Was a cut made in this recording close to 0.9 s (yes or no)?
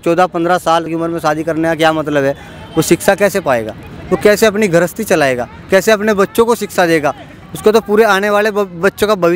yes